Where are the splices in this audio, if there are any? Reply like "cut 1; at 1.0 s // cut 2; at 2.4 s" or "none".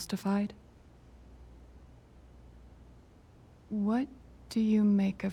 none